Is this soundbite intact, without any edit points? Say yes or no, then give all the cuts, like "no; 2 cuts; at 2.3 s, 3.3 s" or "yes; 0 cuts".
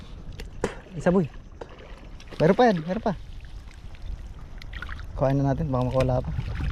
yes; 0 cuts